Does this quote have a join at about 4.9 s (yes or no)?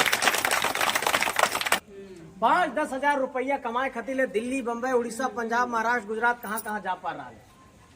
no